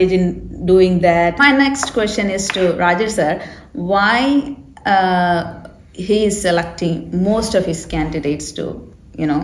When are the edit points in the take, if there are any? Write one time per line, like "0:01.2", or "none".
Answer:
0:01.4